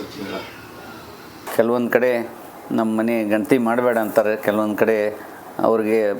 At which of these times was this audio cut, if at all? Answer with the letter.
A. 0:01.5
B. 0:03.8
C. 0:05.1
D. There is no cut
A